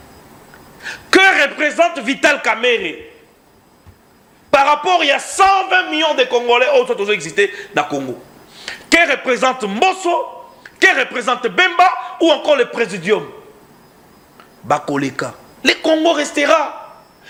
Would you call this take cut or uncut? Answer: uncut